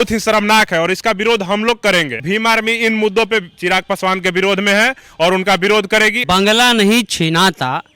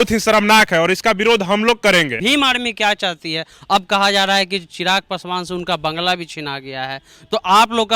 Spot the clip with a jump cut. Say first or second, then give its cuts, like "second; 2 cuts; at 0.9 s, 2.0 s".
first; 2 cuts; at 2.2 s, 6.2 s